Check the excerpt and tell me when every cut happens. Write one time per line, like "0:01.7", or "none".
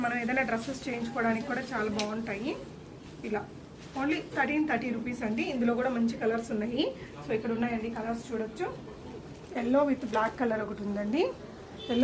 none